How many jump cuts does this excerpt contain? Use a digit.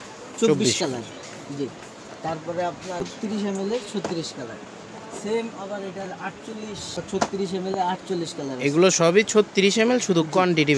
2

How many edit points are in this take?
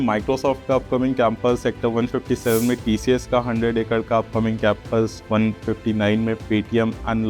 0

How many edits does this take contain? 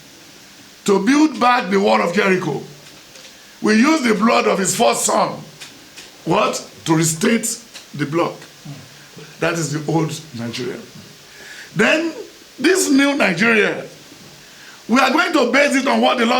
1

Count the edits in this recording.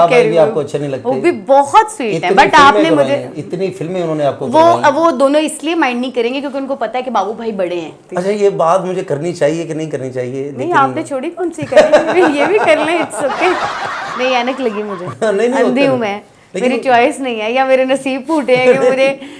2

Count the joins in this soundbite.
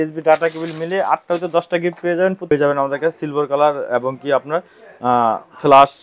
1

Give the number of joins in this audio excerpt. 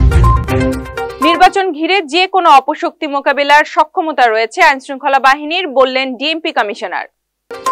0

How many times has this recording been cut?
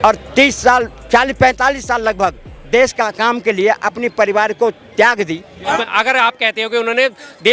1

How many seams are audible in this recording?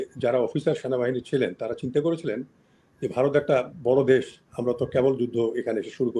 0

